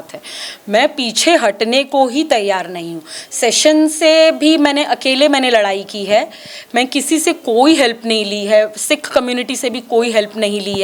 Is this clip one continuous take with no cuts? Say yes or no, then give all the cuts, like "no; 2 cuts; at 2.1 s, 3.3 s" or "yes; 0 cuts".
yes; 0 cuts